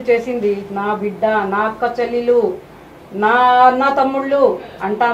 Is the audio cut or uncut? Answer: uncut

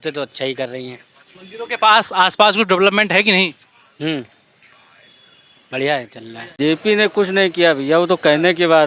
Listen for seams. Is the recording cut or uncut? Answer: cut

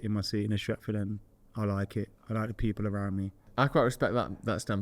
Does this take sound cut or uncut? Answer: cut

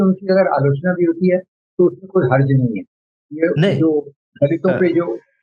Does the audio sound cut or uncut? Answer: uncut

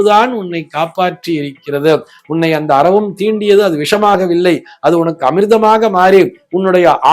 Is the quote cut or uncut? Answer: uncut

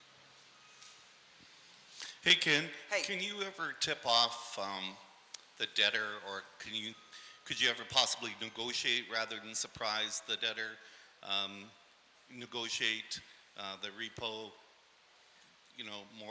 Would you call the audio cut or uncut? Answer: uncut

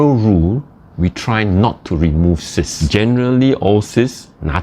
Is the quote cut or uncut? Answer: cut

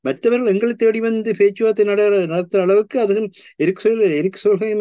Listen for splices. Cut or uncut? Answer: uncut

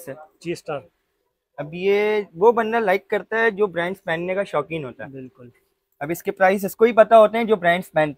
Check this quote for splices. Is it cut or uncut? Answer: uncut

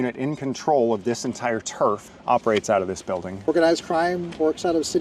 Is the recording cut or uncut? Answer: cut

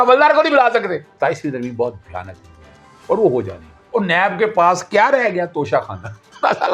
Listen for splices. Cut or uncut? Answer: cut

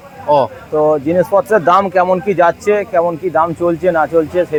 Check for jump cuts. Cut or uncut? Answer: uncut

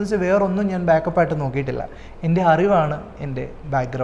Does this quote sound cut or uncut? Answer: uncut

